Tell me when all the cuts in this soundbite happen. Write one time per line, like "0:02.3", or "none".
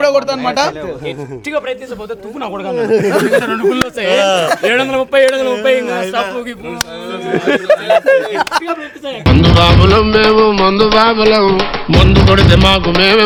none